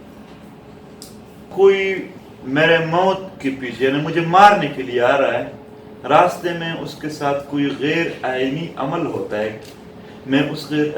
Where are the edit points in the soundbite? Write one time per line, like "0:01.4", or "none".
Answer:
0:01.5